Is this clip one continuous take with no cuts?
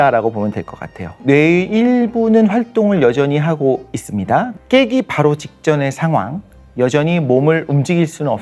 yes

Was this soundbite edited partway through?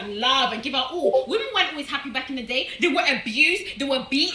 no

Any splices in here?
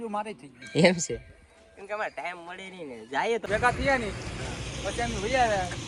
yes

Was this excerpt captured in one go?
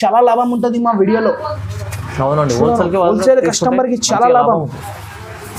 yes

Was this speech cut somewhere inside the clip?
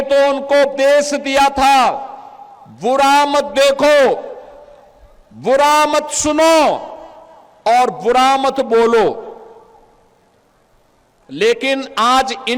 no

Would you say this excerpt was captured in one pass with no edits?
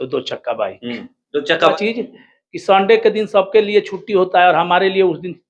no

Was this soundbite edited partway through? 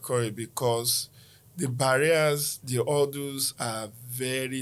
no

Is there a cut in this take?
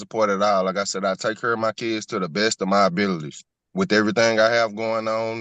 no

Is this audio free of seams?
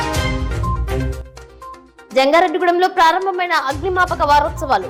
yes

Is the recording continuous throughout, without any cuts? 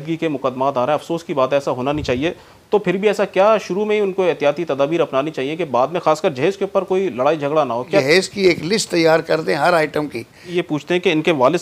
no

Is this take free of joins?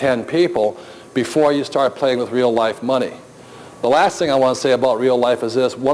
no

